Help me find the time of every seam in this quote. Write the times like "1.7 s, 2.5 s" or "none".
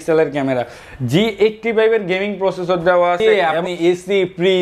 3.2 s